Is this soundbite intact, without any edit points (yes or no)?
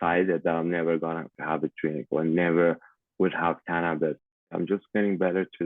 no